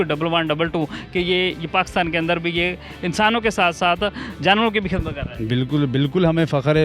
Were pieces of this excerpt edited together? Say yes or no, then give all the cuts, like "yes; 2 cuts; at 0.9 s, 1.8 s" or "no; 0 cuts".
no; 0 cuts